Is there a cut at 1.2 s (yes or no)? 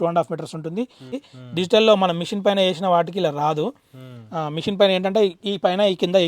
yes